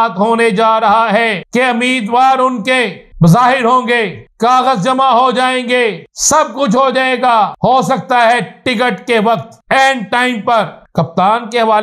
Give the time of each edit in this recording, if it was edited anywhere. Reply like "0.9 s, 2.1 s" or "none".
1.4 s, 3.0 s, 4.2 s, 6.1 s, 7.5 s, 9.5 s, 10.8 s